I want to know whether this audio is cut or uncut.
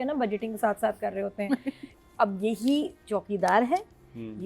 cut